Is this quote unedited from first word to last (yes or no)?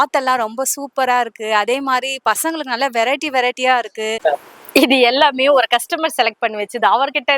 no